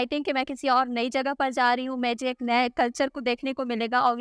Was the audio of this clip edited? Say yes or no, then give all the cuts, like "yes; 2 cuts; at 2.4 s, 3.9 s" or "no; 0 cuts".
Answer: no; 0 cuts